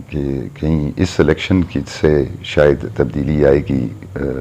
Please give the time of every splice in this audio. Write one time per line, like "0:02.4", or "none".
none